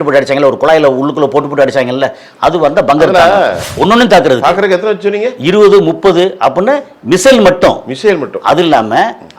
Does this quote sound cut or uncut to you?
cut